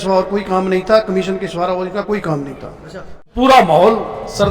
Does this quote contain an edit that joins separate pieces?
yes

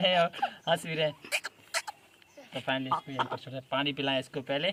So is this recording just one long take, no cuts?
yes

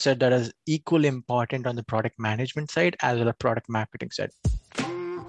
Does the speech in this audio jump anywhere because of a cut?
yes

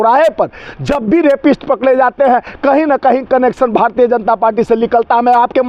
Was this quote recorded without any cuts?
yes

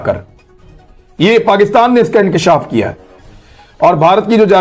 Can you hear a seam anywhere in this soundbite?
no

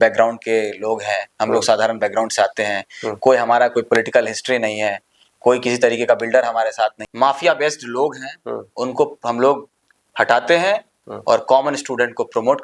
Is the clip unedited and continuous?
no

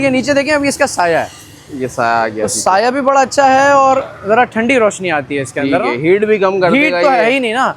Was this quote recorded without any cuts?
yes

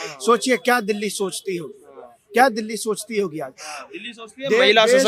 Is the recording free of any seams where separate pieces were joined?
yes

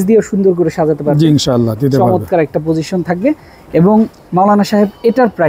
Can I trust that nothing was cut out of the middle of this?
yes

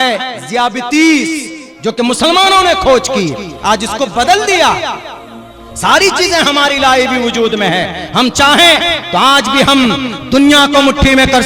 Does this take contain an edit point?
no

